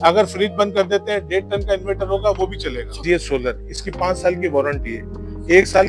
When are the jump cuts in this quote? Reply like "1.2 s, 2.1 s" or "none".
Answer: 3.0 s